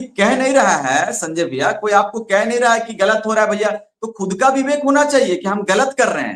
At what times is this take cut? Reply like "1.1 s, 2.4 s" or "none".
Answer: none

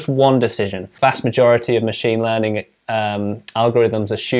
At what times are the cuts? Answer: 0.9 s

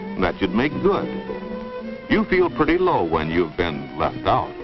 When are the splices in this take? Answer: 2.2 s

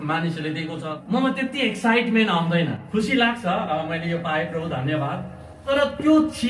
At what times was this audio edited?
0.9 s, 2.8 s, 5.6 s

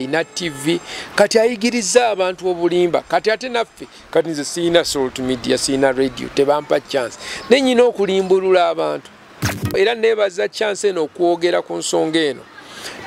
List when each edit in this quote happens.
9.7 s

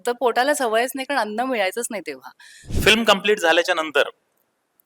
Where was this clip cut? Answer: 2.6 s

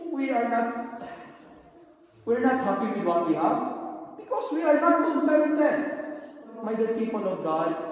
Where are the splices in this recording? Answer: 6.5 s

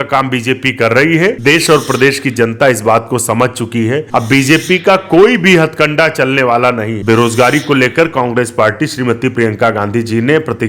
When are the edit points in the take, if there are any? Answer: 1.4 s, 4.1 s, 7.0 s

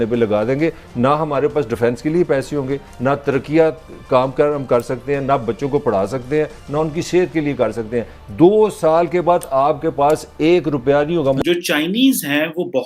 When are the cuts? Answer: 11.4 s

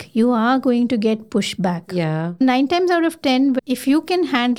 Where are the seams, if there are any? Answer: 2.3 s, 3.6 s

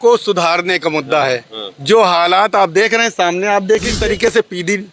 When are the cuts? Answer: 3.9 s

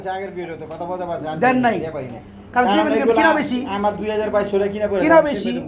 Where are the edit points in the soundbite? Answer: none

